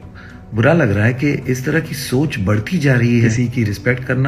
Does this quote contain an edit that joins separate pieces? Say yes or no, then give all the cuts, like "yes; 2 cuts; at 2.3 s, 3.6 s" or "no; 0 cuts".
yes; 1 cut; at 3.3 s